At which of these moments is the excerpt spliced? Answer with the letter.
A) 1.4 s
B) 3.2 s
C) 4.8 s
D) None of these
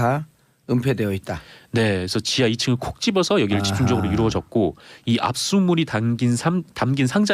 A